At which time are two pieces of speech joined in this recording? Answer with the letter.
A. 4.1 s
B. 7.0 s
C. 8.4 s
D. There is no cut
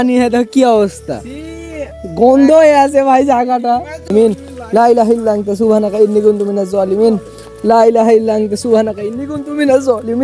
A